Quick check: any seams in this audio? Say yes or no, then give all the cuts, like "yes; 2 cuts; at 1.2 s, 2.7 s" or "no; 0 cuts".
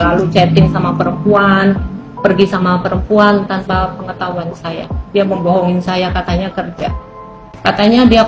no; 0 cuts